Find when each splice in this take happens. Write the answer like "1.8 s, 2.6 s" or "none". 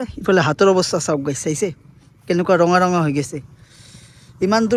none